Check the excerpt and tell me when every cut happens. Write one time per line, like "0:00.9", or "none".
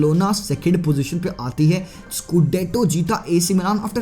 0:02.1